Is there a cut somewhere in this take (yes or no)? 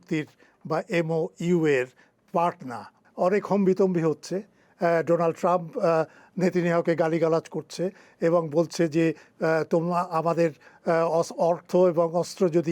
yes